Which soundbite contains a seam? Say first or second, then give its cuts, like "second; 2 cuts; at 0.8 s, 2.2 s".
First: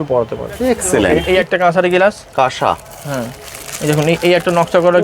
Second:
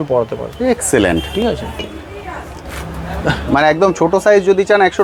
first; 1 cut; at 1.2 s